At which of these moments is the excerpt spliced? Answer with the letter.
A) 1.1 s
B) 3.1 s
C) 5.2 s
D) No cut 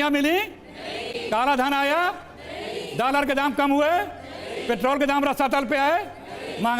A